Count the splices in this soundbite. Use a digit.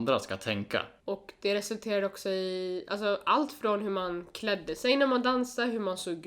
1